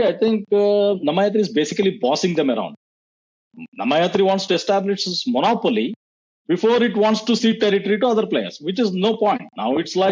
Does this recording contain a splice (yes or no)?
no